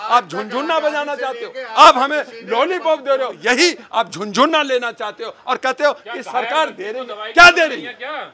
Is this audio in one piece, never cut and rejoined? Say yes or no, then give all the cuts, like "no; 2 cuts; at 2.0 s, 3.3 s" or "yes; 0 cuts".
no; 1 cut; at 3.4 s